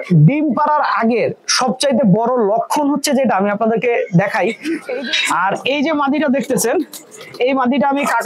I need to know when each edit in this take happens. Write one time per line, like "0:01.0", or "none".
0:04.7